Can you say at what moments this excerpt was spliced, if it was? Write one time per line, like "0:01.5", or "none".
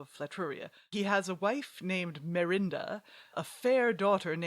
0:00.9
0:03.4